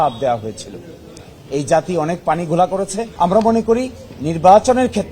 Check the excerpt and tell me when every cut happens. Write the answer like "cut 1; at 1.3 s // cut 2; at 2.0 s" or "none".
cut 1; at 3.1 s